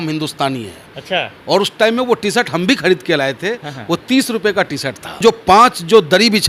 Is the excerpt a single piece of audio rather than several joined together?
no; 1 cut; at 5.2 s

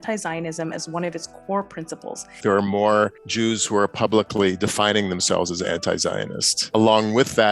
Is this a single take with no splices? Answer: no; 3 cuts; at 2.4 s, 3.2 s, 6.6 s

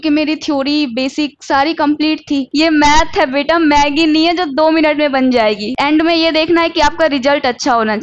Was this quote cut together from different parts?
yes; 2 cuts; at 2.5 s, 5.7 s

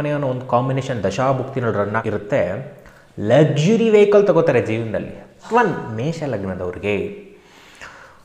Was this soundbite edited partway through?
yes; 2 cuts; at 2.0 s, 5.4 s

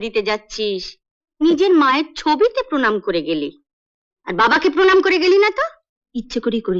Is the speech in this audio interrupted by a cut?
no; 0 cuts

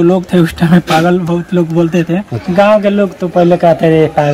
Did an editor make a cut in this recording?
yes; 1 cut; at 2.4 s

